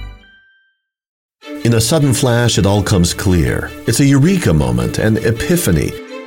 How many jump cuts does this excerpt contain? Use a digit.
1